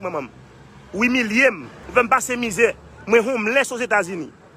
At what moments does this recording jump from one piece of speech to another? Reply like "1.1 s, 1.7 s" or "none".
1.7 s